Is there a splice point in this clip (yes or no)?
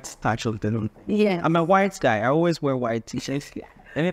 no